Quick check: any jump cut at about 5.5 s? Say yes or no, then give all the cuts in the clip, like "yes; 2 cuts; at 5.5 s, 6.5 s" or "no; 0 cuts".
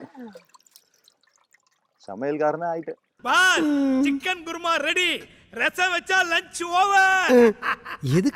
no; 0 cuts